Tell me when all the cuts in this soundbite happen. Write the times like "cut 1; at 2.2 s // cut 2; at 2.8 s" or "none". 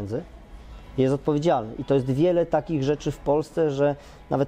none